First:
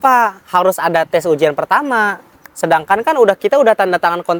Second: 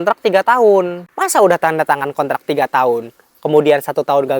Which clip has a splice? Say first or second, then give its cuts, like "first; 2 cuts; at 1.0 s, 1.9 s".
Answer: second; 1 cut; at 1.0 s